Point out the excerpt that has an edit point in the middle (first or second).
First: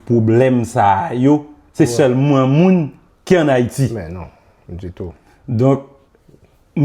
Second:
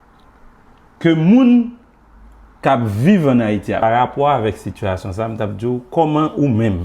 second